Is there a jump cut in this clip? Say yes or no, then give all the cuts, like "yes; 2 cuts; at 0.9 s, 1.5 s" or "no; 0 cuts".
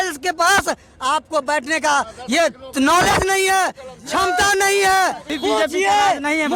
yes; 1 cut; at 5.3 s